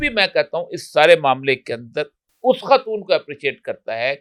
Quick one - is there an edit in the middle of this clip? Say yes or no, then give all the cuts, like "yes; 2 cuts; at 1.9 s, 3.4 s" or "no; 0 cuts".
no; 0 cuts